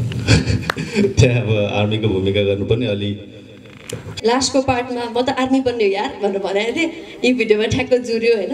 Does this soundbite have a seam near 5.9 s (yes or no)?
no